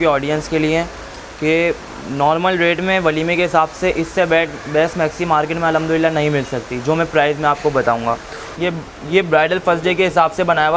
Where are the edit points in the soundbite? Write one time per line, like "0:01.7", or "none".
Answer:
0:08.4